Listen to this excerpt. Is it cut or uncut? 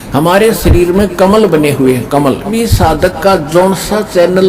cut